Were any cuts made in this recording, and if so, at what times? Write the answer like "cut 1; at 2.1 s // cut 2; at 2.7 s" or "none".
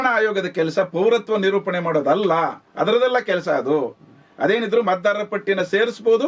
none